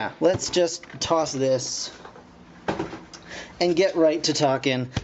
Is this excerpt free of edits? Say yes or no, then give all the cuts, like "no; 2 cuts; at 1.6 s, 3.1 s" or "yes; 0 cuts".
no; 1 cut; at 2.3 s